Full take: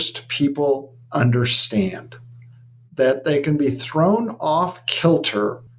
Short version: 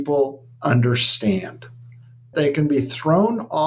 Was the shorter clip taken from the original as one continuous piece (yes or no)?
no